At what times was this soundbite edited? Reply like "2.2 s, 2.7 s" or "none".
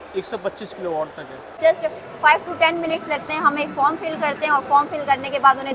1.6 s